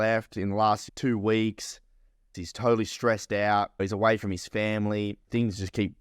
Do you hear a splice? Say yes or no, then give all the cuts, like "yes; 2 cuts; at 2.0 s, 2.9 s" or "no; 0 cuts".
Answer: yes; 4 cuts; at 0.8 s, 2.3 s, 3.8 s, 5.2 s